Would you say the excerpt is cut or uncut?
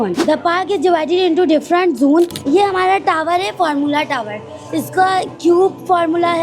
cut